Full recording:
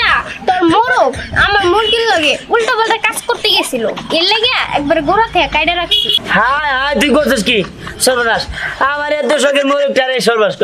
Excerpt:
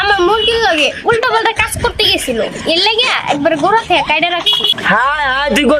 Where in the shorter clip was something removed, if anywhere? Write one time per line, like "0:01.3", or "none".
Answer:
none